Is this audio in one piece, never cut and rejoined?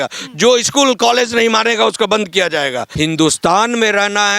no; 1 cut; at 2.9 s

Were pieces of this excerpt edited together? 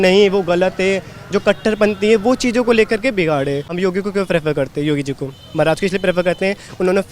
yes; 1 cut; at 3.7 s

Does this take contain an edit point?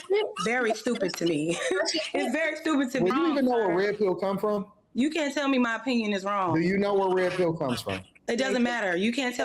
yes; 1 cut; at 3.1 s

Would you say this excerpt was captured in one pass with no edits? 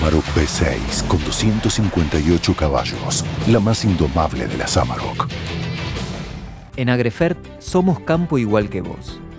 no; 1 cut; at 6.6 s

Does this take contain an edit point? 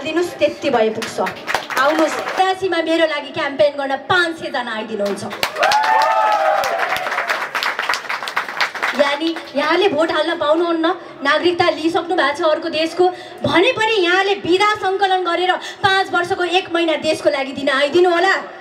yes; 1 cut; at 2.4 s

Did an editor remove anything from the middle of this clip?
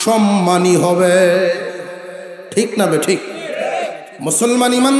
yes; 1 cut; at 4.1 s

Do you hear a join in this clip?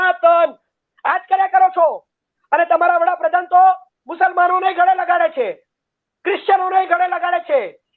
no; 0 cuts

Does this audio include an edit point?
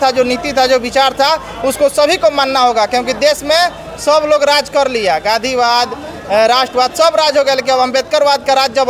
no; 0 cuts

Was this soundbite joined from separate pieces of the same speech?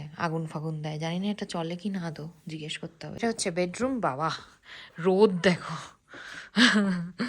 yes; 1 cut; at 3.2 s

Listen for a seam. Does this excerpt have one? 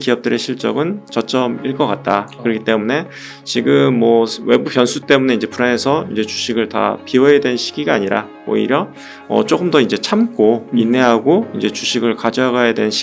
no; 0 cuts

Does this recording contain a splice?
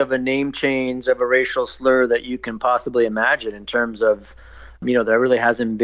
yes; 1 cut; at 4.8 s

